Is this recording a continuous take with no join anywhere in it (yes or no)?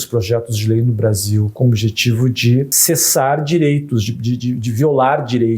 no